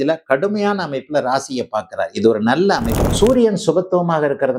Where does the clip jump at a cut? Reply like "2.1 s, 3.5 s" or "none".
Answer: 3.0 s